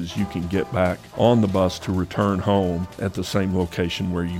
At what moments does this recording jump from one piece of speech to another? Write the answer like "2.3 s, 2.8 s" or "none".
1.0 s, 3.0 s